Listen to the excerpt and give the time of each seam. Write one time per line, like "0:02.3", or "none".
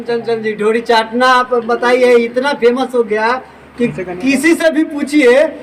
none